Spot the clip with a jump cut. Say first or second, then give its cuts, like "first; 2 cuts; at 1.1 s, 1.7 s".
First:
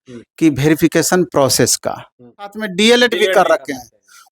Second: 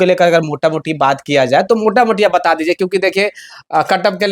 first; 1 cut; at 2.6 s